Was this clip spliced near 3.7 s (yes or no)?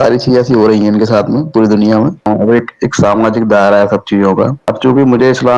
no